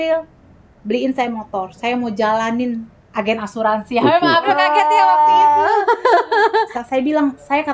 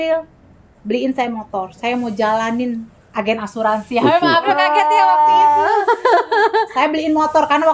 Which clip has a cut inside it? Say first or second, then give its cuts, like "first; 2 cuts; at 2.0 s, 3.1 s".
first; 1 cut; at 6.7 s